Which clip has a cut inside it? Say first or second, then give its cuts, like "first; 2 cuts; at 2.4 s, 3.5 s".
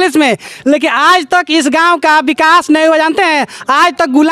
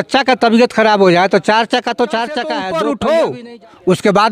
second; 1 cut; at 2.5 s